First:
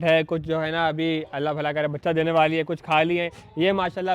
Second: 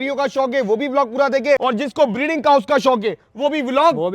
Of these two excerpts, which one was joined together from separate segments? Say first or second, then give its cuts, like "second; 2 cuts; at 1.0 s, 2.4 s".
second; 1 cut; at 1.6 s